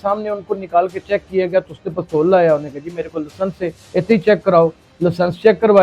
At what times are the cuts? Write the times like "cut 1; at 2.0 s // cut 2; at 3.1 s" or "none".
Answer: none